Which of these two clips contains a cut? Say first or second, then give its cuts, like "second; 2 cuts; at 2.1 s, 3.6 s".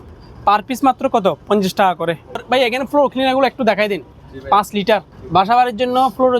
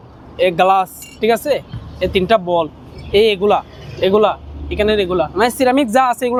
first; 2 cuts; at 2.4 s, 5.2 s